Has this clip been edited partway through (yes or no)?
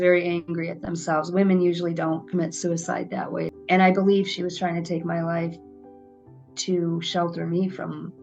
yes